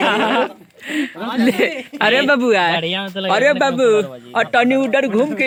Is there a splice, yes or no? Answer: no